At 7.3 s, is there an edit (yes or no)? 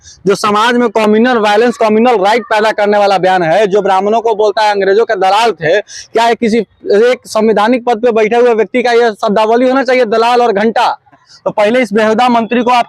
no